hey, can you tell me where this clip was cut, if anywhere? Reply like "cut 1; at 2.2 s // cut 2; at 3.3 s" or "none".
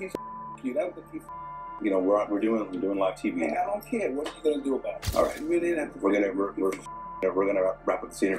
cut 1; at 5.0 s